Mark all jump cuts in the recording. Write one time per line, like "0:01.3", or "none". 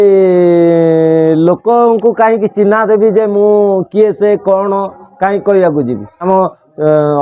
0:06.2